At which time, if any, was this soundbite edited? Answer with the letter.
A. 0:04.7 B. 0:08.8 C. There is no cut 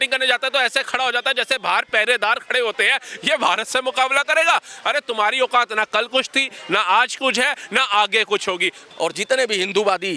B